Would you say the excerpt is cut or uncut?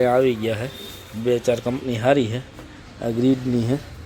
uncut